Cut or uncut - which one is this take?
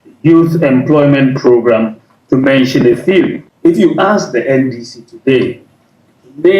cut